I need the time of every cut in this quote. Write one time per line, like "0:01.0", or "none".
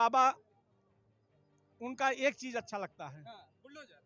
none